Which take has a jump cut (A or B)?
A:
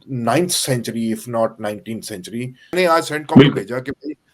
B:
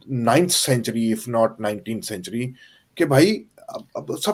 A